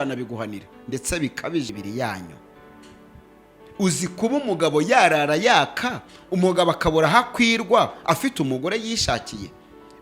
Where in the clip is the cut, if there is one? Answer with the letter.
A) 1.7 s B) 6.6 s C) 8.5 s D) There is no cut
A